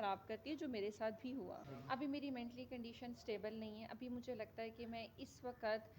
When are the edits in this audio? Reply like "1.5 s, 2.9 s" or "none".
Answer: 1.7 s